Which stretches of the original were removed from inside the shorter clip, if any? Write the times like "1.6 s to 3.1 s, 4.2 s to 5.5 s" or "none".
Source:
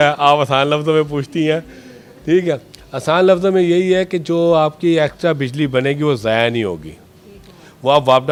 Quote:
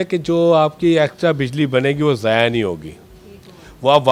none